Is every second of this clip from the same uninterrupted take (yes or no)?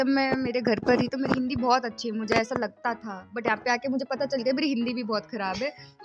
yes